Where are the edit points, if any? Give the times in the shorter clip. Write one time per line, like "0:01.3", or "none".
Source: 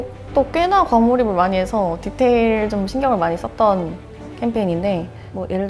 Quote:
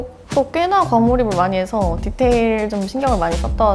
none